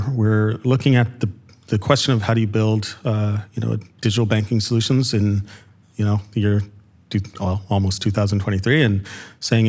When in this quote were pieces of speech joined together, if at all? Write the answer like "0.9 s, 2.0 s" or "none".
none